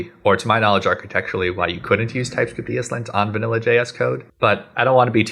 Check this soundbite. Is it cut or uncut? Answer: cut